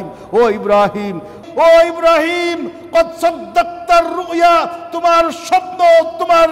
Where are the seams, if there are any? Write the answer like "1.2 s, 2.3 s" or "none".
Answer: 1.4 s